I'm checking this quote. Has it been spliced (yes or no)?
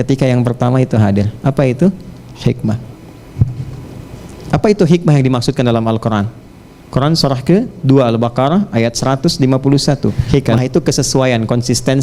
yes